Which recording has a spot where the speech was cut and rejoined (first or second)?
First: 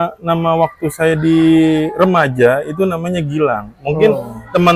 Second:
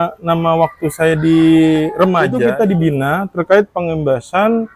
second